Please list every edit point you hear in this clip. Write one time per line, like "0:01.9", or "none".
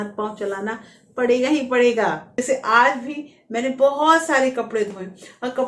0:02.3